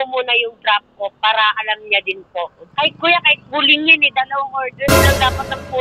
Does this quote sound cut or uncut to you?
cut